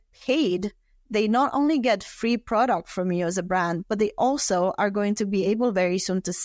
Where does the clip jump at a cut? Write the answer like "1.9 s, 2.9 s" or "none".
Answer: none